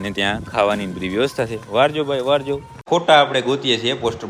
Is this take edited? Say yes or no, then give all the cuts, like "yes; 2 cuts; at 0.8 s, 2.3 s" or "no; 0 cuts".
yes; 1 cut; at 2.7 s